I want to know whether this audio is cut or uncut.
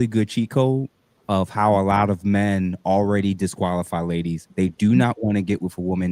cut